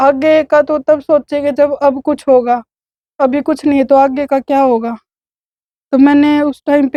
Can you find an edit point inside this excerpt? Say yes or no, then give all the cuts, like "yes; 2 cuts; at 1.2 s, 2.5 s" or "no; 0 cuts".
no; 0 cuts